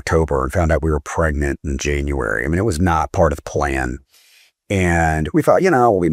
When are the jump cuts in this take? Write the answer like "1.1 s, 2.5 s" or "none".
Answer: none